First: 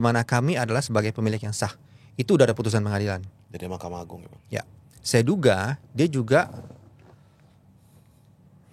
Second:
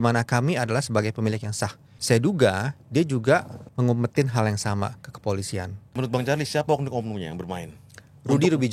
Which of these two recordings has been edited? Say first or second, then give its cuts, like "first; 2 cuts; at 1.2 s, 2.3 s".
second; 3 cuts; at 1.9 s, 3.6 s, 5.8 s